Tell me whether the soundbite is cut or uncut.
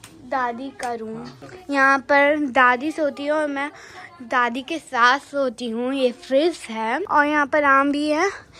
cut